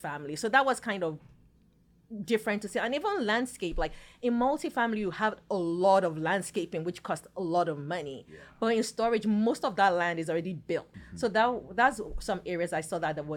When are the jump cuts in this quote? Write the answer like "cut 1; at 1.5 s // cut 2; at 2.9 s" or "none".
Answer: cut 1; at 11.0 s